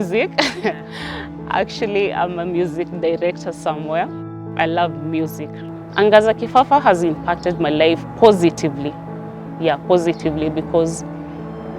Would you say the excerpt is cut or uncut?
cut